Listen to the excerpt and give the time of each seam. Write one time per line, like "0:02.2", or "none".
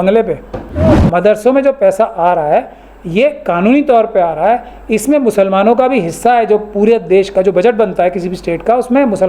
0:00.9